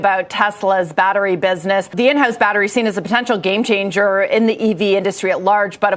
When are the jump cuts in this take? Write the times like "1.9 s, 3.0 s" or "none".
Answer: 1.9 s